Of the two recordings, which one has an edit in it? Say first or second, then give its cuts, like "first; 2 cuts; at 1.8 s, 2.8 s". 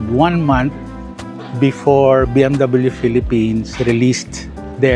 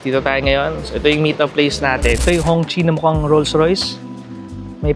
second; 1 cut; at 2.2 s